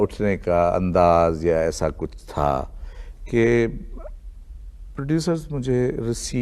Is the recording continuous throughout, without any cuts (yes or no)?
yes